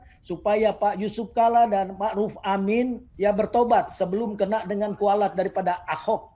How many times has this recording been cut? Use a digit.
1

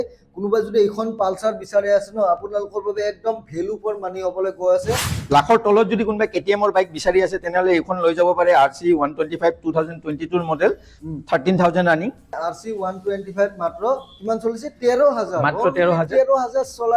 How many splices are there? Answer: 2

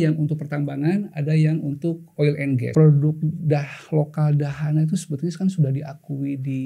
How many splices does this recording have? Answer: 1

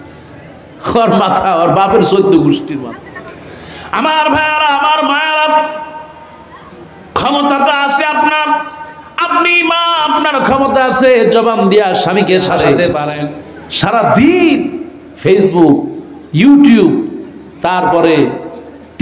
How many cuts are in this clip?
2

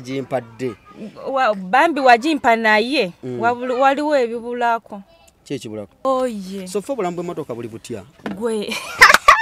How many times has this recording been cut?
1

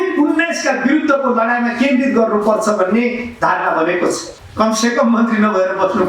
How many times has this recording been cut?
1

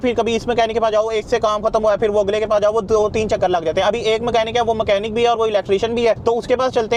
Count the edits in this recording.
0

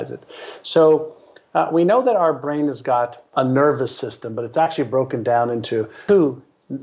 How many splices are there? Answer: 2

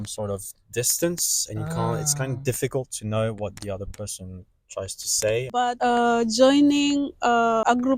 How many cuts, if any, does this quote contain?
1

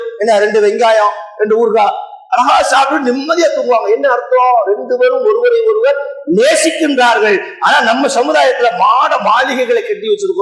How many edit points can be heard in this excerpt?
0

